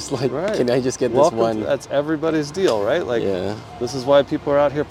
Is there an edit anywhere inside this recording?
no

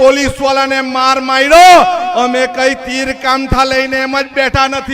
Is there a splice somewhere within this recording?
no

